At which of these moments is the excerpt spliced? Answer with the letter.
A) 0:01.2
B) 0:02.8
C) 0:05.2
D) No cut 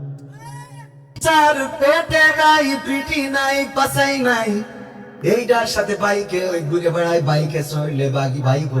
A